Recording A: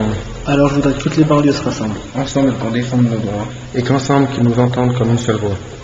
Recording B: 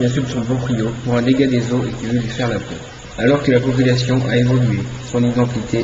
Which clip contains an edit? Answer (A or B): B